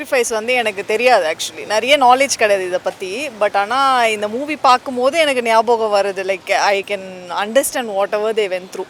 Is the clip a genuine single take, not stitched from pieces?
yes; 0 cuts

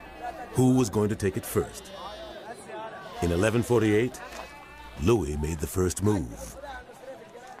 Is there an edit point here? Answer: yes; 1 cut; at 6.0 s

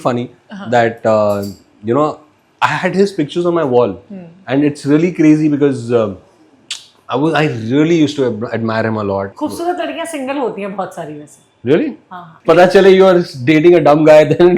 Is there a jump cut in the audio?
yes; 2 cuts; at 9.3 s, 12.3 s

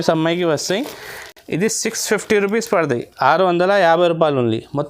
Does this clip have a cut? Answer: no; 0 cuts

